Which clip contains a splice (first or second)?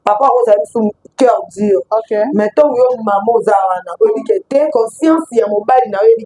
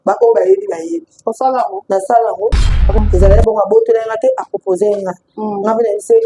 second